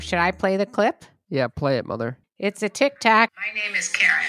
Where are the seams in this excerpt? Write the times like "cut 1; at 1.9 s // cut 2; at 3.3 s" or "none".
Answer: cut 1; at 2.1 s // cut 2; at 3.4 s